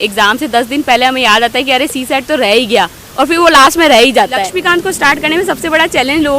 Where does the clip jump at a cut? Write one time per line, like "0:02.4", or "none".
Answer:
0:04.5